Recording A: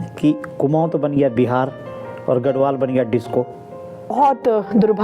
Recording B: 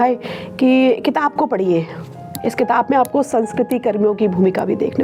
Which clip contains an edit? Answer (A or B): A